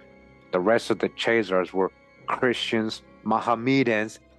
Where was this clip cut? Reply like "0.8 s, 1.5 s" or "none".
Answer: none

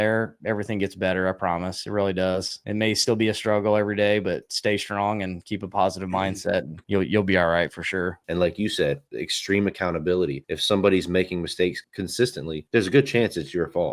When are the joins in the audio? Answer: 8.2 s

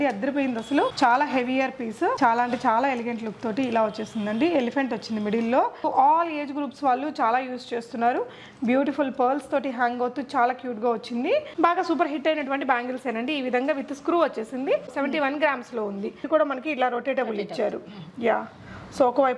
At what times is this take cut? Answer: 0.9 s, 2.2 s, 5.8 s, 11.5 s, 16.2 s

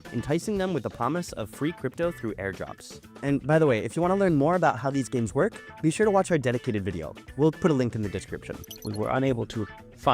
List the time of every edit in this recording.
none

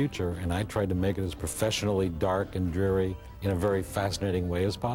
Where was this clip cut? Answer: none

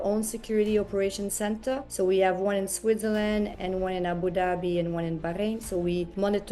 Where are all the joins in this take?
none

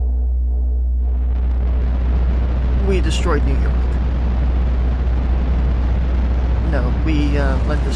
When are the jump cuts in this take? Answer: 3.9 s

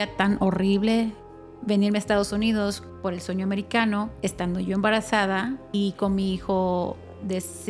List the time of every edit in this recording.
1.2 s, 2.9 s, 4.1 s, 5.7 s

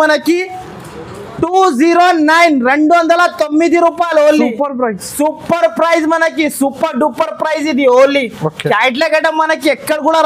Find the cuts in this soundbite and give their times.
none

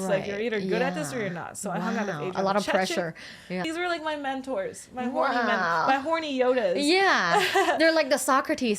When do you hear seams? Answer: 3.6 s

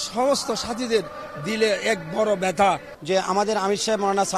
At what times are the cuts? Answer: 2.9 s

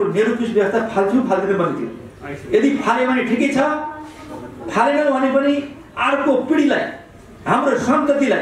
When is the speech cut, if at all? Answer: none

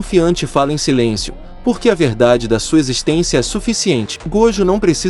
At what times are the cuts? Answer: 4.2 s

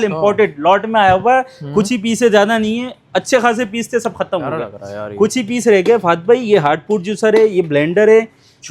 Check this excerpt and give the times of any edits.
none

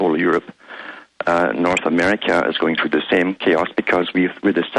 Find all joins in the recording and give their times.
2.0 s

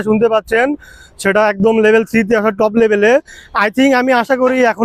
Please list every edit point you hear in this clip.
none

